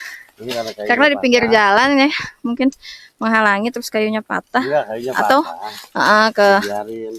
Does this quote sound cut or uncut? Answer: uncut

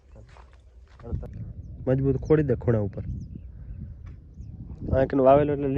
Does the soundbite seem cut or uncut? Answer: cut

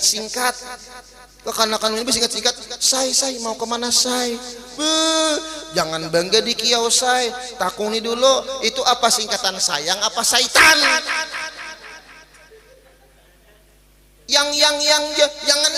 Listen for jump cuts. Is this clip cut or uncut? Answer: uncut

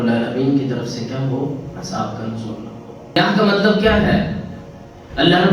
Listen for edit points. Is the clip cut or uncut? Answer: cut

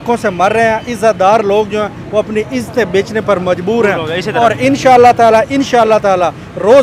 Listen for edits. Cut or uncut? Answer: uncut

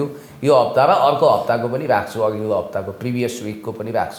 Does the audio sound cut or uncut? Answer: uncut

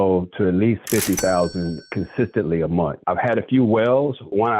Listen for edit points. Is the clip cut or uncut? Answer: cut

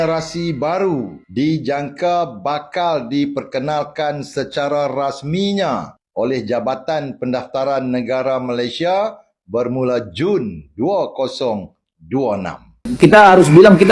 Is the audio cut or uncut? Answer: cut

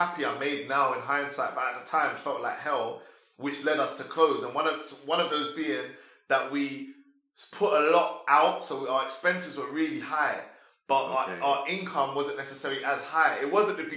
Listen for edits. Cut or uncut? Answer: uncut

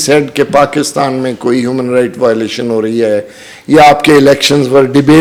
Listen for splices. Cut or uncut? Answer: uncut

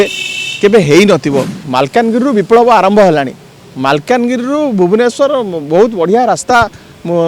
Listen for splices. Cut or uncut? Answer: cut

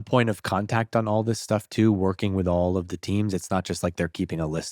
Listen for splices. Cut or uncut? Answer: uncut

